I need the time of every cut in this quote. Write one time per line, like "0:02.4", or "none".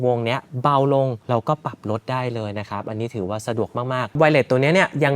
0:04.1